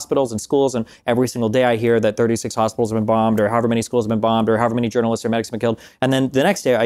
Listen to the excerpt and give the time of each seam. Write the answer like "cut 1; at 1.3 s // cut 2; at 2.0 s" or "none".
none